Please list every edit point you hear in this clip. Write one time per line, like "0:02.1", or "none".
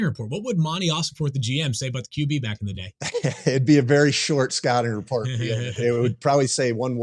0:05.8